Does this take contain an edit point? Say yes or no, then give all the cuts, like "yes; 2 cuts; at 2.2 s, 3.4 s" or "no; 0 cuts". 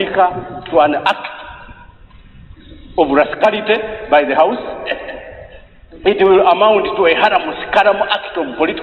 no; 0 cuts